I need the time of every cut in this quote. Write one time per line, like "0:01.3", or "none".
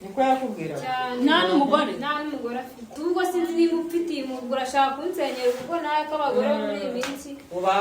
0:02.9